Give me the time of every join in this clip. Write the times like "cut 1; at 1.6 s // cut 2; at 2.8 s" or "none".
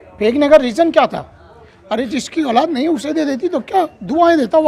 none